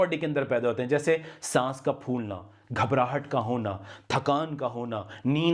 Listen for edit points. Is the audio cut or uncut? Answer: uncut